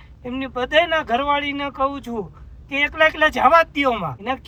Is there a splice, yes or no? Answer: no